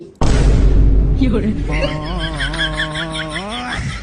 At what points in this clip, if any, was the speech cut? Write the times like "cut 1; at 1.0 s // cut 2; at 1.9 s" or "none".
none